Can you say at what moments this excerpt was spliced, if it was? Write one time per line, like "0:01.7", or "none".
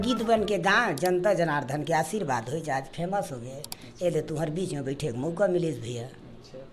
none